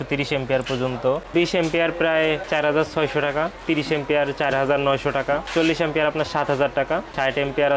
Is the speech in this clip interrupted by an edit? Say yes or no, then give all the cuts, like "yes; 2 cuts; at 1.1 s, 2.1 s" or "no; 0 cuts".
yes; 1 cut; at 1.3 s